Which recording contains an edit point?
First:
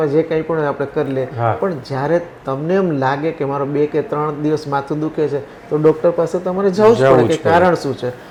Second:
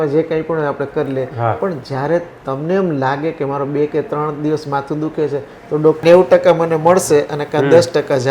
second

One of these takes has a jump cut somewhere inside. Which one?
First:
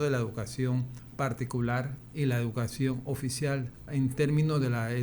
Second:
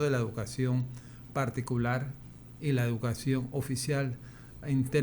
first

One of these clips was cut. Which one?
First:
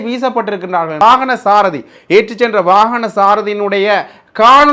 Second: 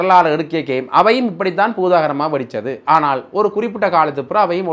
first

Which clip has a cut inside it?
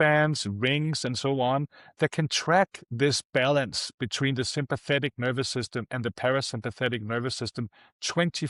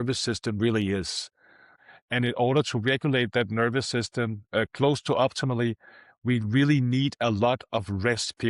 second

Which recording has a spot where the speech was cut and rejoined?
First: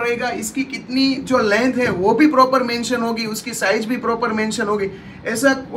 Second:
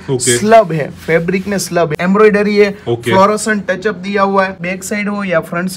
second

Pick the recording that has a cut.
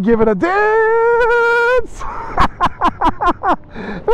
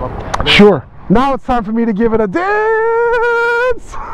second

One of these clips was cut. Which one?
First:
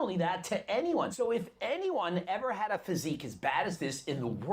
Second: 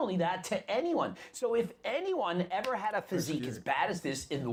first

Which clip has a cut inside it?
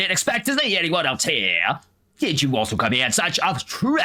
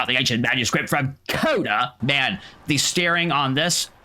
second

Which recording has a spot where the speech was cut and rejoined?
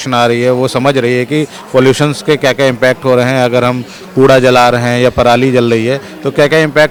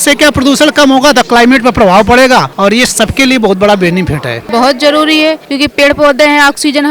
second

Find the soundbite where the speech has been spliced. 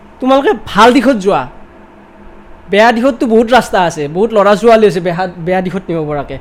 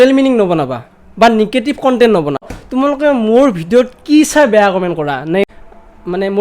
second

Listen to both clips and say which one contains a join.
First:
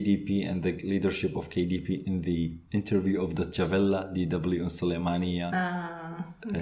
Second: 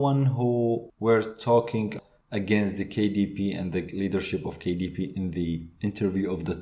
second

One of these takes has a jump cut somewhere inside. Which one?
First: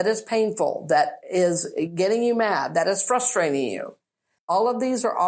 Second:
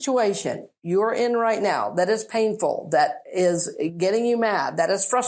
first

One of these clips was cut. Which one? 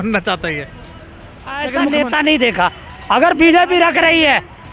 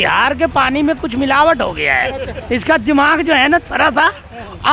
first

